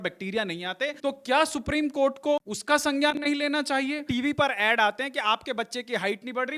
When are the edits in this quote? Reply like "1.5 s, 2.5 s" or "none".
1.0 s, 2.5 s, 4.0 s